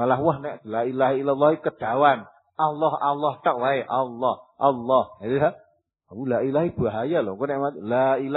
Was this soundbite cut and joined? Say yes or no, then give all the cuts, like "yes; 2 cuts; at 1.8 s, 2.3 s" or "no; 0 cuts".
no; 0 cuts